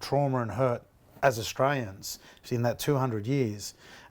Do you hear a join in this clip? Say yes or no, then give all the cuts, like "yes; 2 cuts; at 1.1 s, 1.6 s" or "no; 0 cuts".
no; 0 cuts